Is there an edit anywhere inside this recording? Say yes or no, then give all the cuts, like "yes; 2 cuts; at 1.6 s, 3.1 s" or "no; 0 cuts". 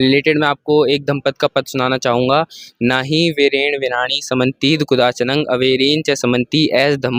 no; 0 cuts